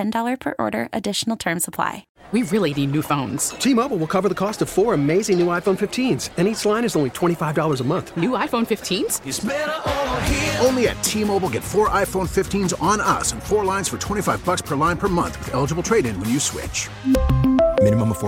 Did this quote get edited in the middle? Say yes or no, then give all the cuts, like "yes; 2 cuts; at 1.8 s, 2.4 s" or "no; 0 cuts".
yes; 1 cut; at 2.1 s